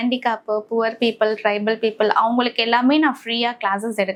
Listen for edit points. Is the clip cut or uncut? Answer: uncut